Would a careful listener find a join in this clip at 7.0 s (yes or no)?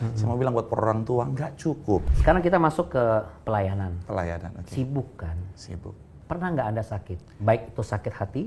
no